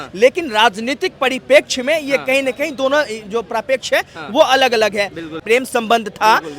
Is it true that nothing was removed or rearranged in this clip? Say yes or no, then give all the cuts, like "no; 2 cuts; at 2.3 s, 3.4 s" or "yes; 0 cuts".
no; 1 cut; at 5.4 s